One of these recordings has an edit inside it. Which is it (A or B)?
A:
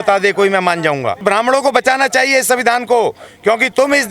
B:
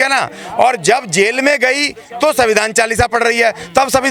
A